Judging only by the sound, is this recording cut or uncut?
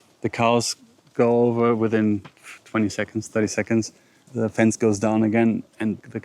uncut